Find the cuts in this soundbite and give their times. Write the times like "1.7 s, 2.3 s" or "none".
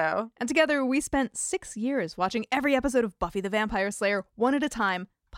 none